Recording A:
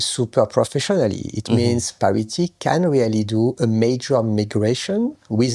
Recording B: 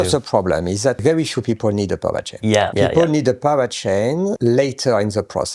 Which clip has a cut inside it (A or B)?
B